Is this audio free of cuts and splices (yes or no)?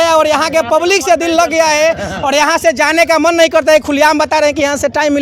yes